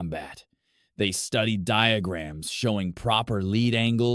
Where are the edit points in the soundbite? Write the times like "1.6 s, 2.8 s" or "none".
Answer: none